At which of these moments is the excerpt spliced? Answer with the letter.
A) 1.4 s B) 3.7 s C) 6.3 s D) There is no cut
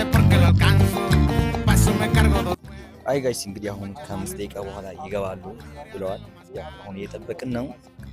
A